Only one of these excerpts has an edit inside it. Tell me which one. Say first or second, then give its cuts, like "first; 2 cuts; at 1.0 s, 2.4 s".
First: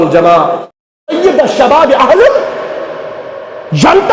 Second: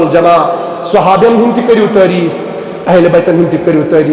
first; 1 cut; at 0.9 s